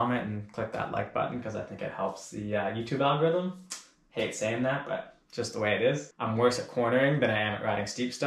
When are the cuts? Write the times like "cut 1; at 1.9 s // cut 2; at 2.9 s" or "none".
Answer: cut 1; at 6.1 s